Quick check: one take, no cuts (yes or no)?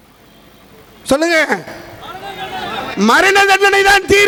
yes